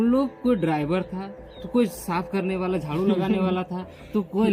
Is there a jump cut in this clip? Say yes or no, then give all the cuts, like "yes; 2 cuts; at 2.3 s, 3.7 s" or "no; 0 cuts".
no; 0 cuts